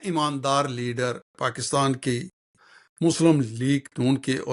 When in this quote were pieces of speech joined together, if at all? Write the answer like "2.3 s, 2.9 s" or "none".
none